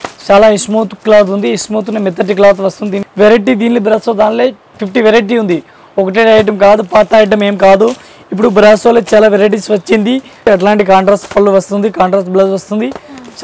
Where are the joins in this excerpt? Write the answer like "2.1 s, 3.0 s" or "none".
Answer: 3.0 s, 10.5 s